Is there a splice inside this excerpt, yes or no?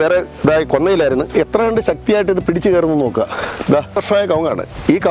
yes